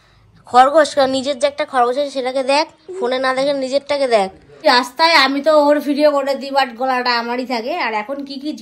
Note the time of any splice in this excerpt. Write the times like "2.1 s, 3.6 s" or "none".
4.5 s